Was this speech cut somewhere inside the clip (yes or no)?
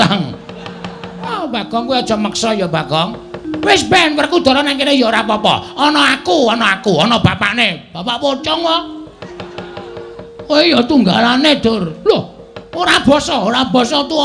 yes